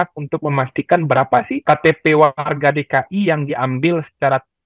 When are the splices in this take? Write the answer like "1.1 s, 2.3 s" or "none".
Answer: 1.6 s